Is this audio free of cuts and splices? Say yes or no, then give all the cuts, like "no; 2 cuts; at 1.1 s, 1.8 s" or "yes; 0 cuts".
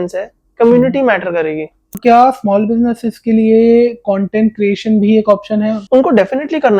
no; 2 cuts; at 2.0 s, 5.8 s